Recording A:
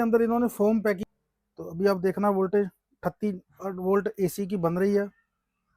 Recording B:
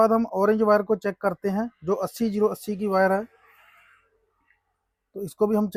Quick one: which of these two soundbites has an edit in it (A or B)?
A